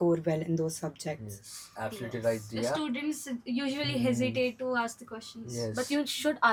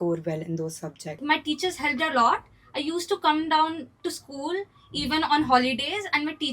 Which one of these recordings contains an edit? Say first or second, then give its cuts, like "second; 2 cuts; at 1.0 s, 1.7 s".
second; 1 cut; at 1.2 s